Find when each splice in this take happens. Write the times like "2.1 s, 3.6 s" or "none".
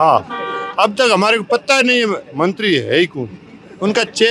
none